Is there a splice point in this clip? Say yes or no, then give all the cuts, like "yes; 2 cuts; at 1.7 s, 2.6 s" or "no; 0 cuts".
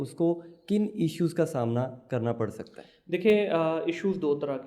no; 0 cuts